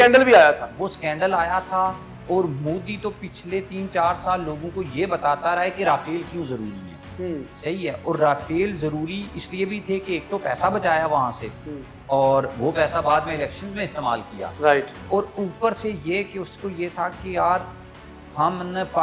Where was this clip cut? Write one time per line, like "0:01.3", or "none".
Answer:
none